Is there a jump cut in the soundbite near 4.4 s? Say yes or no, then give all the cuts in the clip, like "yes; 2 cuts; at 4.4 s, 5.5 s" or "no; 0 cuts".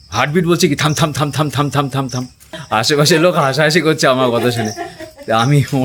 no; 1 cut; at 2.6 s